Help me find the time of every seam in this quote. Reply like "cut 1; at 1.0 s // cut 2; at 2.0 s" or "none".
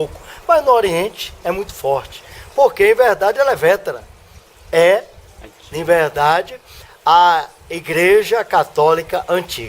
cut 1; at 6.9 s